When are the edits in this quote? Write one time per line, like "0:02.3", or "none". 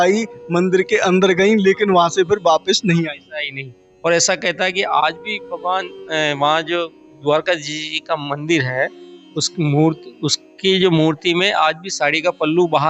none